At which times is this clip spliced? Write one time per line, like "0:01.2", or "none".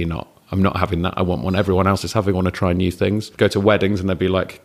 0:03.3